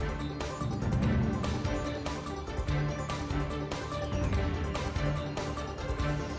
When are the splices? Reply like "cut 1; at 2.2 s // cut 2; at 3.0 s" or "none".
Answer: none